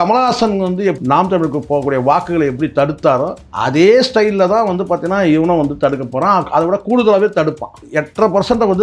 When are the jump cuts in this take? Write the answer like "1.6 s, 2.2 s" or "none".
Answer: 1.0 s, 3.4 s, 7.7 s